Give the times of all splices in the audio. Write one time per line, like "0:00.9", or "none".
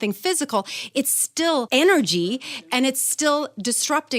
0:01.7